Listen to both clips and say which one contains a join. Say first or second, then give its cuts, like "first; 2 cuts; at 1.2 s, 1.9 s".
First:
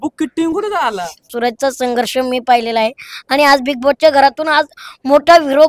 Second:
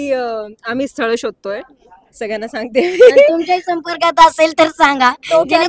first; 1 cut; at 1.3 s